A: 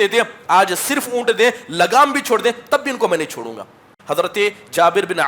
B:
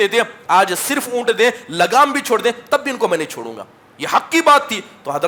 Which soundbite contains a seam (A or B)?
A